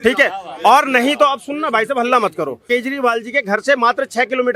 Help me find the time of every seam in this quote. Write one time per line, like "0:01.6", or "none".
0:02.6